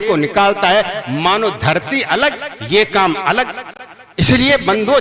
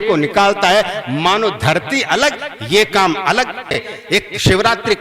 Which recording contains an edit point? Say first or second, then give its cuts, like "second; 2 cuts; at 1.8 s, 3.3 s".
second; 1 cut; at 3.9 s